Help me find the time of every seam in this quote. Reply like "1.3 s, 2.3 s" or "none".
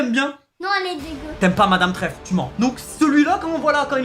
2.5 s